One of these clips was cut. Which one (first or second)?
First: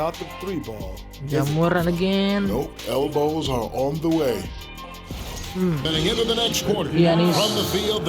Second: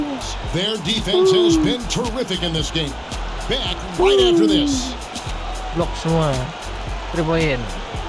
first